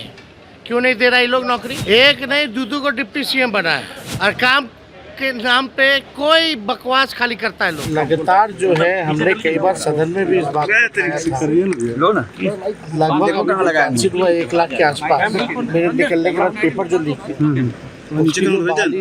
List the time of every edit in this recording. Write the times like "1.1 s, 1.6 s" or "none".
1.7 s, 4.0 s, 7.8 s